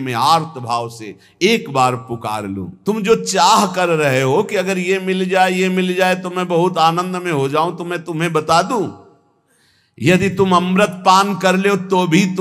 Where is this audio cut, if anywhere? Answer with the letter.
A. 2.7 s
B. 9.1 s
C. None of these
A